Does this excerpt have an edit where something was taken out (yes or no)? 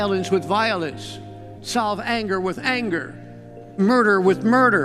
yes